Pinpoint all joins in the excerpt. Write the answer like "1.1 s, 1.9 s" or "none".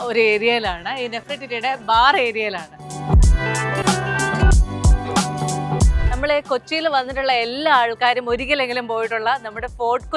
2.9 s, 6.0 s